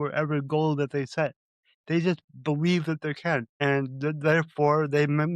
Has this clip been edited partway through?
yes; 1 cut; at 3.5 s

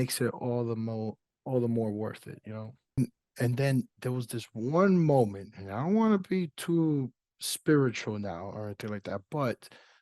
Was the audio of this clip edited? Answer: yes; 1 cut; at 3.0 s

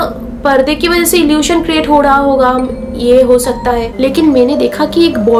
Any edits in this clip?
yes; 1 cut; at 3.9 s

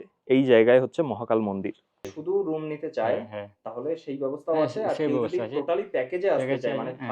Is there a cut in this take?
yes; 1 cut; at 2.2 s

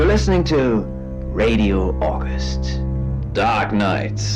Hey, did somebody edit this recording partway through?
yes; 1 cut; at 3.2 s

